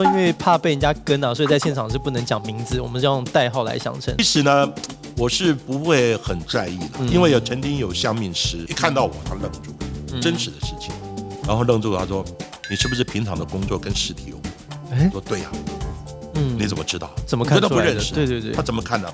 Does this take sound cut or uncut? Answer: cut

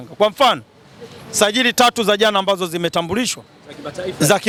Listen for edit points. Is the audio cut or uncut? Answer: uncut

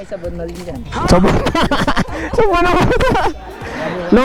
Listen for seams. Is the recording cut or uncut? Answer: uncut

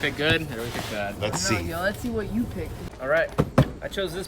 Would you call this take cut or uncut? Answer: cut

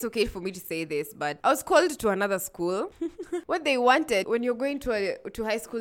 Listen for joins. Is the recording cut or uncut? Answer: cut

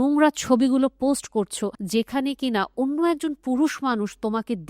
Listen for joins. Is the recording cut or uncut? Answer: cut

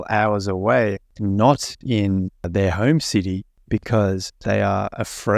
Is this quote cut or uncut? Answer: cut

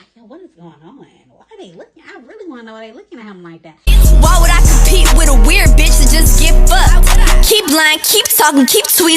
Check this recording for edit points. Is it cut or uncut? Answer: cut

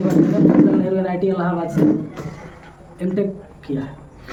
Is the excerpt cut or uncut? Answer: uncut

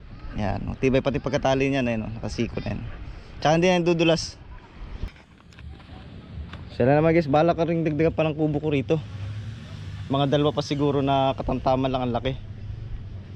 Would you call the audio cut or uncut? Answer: cut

